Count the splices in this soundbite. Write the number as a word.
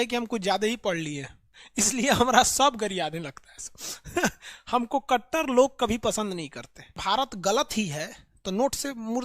two